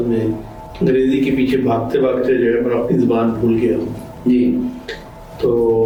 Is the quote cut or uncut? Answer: uncut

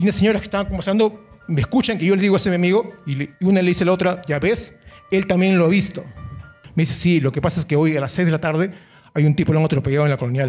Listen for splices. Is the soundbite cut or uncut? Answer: cut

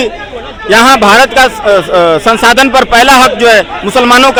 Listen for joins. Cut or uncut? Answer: uncut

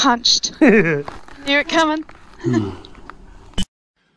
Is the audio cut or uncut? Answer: uncut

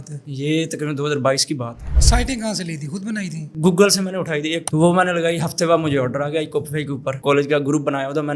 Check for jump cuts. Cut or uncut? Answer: cut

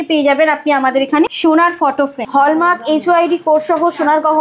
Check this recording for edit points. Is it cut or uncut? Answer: cut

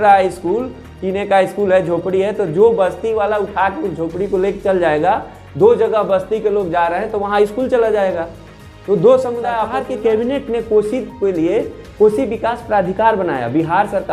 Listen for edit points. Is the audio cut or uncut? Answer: cut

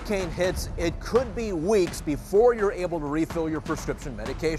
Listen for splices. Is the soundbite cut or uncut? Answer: uncut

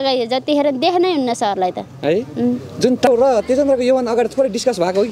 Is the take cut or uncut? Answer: cut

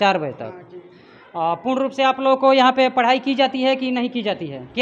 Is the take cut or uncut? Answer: uncut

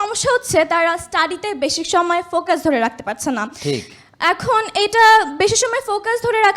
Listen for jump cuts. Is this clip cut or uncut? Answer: uncut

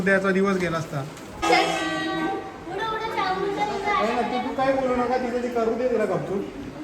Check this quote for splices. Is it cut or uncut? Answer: cut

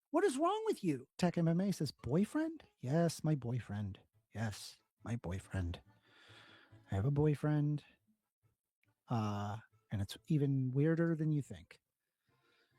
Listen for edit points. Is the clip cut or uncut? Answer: cut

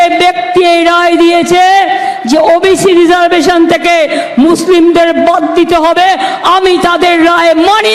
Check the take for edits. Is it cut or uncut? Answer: uncut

